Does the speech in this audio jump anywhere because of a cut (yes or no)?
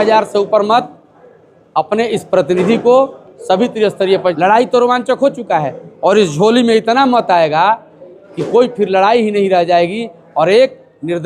yes